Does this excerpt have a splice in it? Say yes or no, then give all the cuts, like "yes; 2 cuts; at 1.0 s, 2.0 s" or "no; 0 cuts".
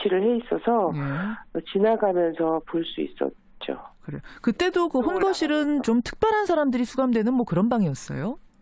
no; 0 cuts